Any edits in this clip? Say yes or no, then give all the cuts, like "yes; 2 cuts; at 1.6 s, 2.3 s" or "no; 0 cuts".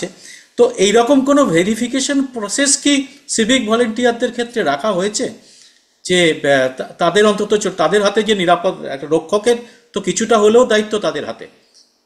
no; 0 cuts